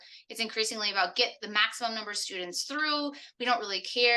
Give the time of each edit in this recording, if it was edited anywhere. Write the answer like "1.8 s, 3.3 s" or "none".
none